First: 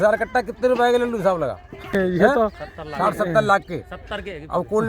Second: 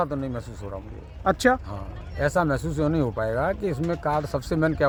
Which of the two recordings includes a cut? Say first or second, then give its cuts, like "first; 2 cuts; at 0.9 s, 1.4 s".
first; 1 cut; at 1.9 s